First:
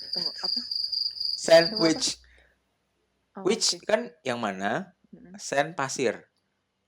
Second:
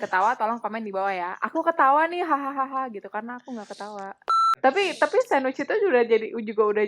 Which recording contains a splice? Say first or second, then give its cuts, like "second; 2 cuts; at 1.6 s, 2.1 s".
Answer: second; 1 cut; at 4.5 s